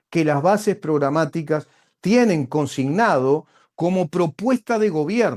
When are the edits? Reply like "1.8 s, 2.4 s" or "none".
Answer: none

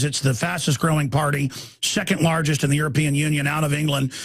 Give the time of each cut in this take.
2.4 s

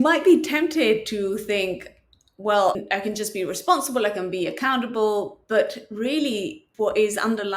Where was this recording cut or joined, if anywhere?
2.8 s, 6.6 s

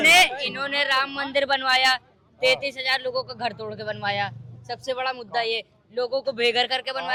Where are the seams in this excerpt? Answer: none

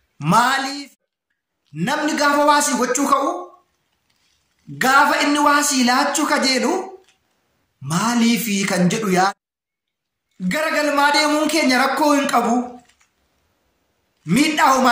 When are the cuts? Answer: 0.7 s, 9.3 s

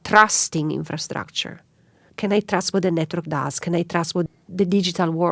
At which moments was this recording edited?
2.0 s, 4.3 s

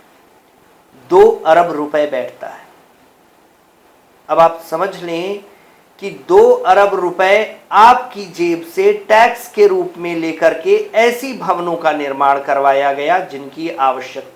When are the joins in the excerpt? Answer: none

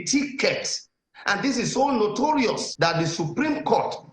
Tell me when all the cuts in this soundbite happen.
2.7 s

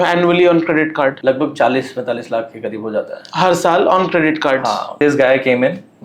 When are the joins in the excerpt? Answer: 1.2 s, 4.9 s

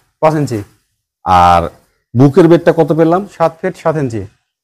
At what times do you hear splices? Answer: none

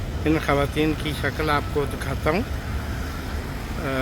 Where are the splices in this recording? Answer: none

